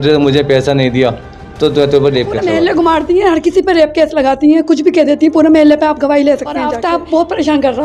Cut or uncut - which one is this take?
cut